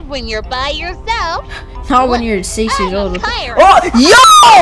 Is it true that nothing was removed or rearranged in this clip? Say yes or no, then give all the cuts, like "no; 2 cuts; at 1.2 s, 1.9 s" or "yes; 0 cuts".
yes; 0 cuts